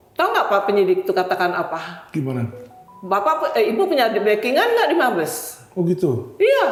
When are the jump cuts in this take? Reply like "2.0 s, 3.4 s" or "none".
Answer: none